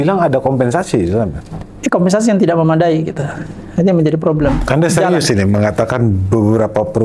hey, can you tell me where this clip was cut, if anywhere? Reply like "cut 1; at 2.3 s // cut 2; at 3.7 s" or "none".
cut 1; at 4.6 s